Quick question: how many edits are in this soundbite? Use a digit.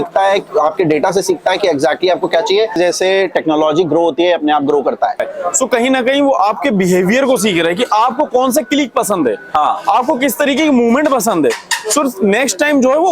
2